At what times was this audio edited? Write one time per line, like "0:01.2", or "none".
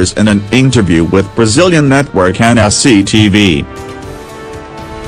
none